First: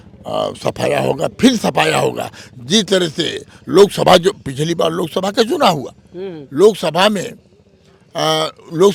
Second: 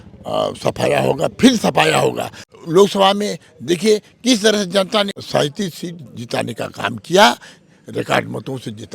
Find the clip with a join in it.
second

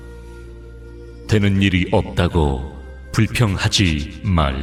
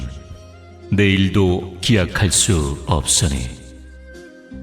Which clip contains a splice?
second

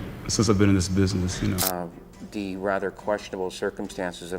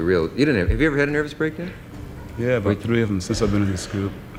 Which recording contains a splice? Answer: first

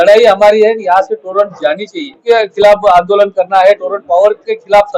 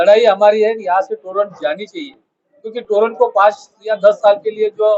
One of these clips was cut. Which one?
first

